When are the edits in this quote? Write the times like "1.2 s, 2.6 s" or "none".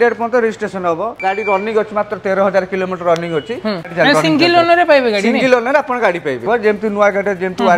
1.1 s, 3.9 s, 6.4 s